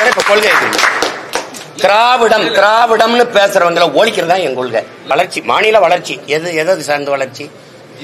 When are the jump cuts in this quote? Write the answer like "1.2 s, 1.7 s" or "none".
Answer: 5.1 s